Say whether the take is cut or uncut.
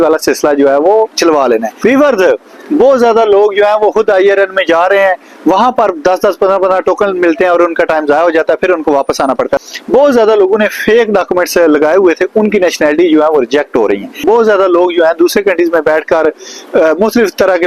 cut